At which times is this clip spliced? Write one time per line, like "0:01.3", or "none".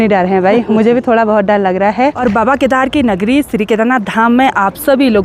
0:02.2